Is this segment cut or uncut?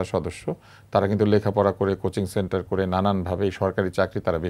uncut